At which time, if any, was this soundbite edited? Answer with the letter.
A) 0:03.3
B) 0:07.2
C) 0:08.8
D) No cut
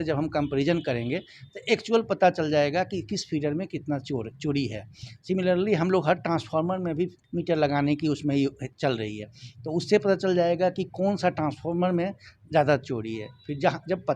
B